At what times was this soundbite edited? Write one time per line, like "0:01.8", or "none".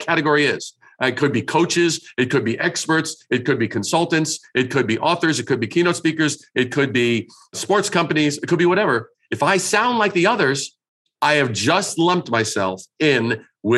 none